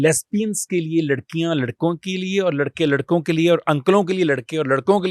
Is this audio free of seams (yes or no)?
yes